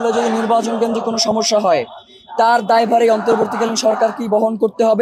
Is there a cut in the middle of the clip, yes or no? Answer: no